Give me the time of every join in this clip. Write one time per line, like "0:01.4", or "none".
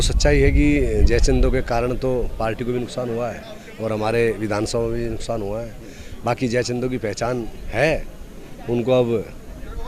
none